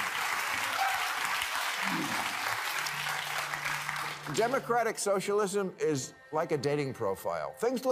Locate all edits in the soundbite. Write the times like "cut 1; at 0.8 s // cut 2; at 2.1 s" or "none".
none

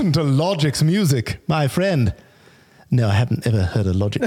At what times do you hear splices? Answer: none

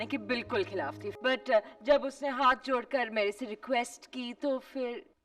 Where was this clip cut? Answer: cut 1; at 1.1 s

